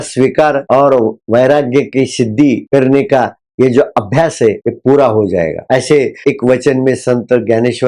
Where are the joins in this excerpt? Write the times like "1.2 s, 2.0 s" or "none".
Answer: none